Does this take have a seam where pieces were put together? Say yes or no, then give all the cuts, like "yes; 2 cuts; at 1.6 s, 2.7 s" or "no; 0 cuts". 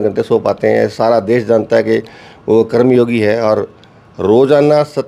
no; 0 cuts